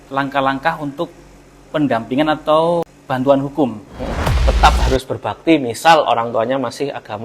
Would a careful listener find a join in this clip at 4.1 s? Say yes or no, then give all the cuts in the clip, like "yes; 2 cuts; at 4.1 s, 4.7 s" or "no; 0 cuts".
yes; 2 cuts; at 3.0 s, 4.1 s